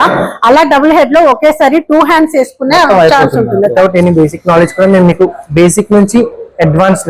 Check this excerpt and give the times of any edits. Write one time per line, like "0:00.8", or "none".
0:03.7

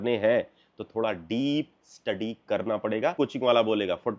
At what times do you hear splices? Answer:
0:03.2

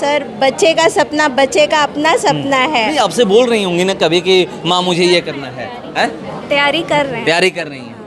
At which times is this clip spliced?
none

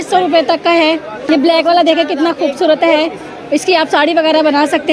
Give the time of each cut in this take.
0:01.2

